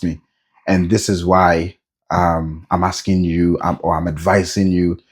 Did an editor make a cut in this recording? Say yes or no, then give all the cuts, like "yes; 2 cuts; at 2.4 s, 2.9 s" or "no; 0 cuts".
no; 0 cuts